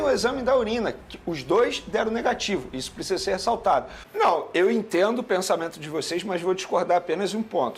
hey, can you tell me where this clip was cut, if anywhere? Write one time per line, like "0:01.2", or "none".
0:04.0